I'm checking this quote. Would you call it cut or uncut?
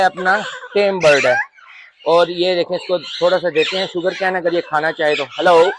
uncut